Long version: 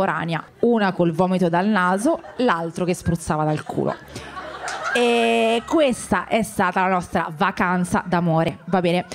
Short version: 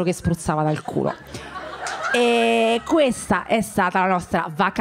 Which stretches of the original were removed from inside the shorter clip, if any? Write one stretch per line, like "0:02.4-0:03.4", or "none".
none